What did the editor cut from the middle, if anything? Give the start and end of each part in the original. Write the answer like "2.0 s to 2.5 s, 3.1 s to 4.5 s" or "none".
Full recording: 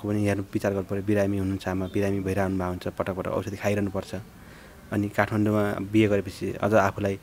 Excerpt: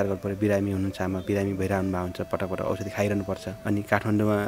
4.2 s to 4.8 s